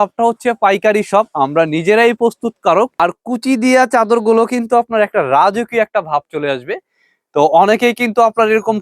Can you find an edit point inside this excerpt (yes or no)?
yes